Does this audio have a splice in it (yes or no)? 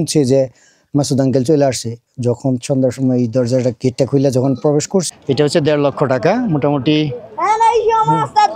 yes